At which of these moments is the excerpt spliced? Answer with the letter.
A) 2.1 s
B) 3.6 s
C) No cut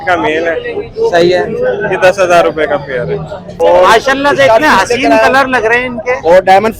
B